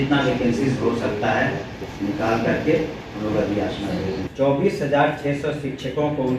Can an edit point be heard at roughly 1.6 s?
no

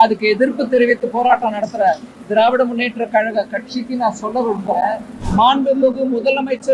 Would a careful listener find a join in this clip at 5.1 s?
yes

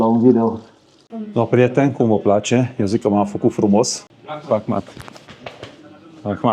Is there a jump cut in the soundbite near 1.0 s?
yes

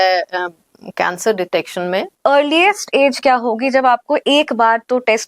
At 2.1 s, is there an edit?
yes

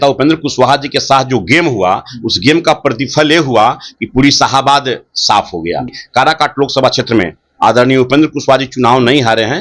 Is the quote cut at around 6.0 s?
yes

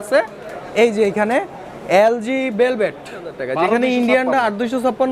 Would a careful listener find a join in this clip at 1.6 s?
no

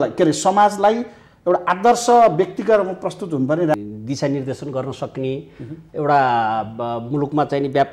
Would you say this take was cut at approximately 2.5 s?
no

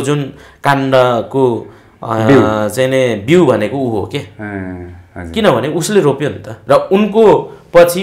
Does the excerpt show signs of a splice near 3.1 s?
no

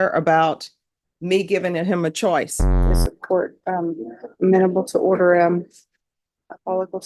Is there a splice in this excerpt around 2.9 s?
yes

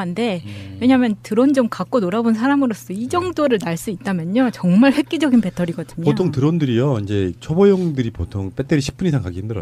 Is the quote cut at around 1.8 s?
yes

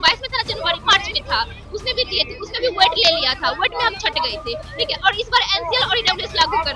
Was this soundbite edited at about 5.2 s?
no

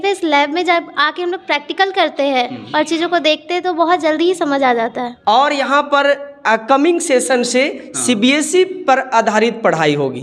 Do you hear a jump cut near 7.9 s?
no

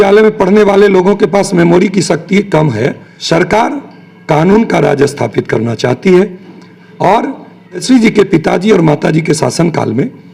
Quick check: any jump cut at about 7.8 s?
yes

